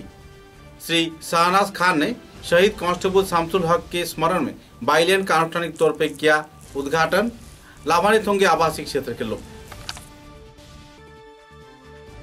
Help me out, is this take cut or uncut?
uncut